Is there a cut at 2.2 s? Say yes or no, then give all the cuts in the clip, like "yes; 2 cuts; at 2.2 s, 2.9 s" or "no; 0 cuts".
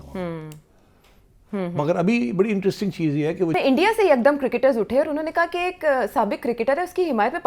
no; 1 cut; at 3.5 s